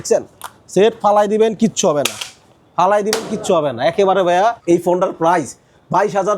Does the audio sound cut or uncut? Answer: cut